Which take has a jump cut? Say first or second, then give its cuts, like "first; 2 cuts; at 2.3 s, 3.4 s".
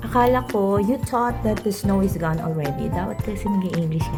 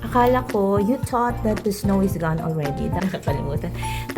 second; 1 cut; at 3.0 s